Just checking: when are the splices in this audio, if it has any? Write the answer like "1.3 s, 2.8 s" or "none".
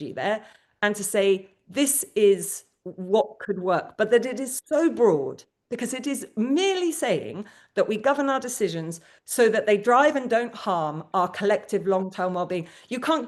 none